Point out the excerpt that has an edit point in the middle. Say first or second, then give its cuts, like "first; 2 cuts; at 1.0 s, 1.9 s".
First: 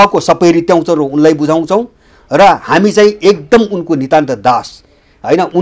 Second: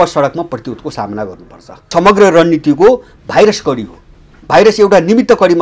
second; 1 cut; at 1.9 s